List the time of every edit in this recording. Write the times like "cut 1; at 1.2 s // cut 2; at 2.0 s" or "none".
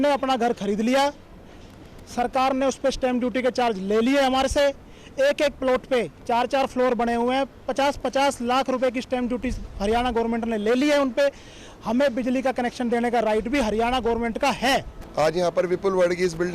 cut 1; at 15.0 s